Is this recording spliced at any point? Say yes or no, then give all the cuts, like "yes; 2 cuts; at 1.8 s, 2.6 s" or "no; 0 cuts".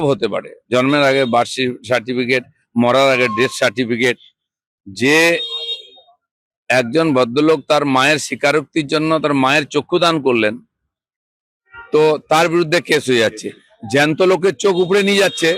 no; 0 cuts